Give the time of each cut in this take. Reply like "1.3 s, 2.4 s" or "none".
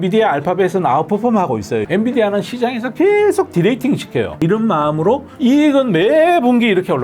1.8 s, 4.4 s